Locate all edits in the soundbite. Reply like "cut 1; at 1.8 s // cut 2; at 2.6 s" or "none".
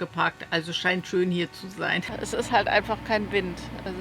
cut 1; at 2.2 s